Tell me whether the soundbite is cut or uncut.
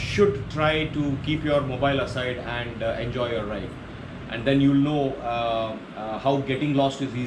uncut